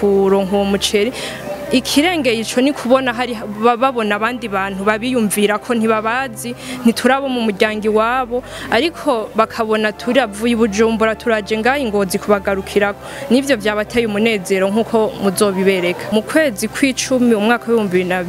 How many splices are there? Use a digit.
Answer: 1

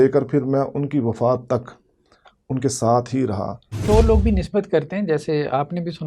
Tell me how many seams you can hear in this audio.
1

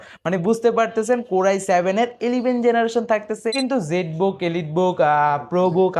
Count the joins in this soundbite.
1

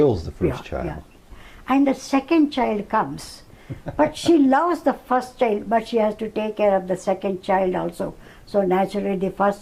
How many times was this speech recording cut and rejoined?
0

